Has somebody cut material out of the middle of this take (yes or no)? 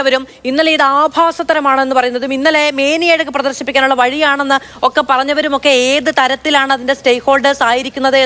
no